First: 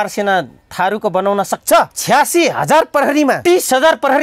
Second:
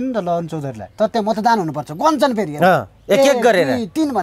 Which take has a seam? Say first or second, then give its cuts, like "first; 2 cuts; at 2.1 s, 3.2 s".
first; 2 cuts; at 2.0 s, 3.4 s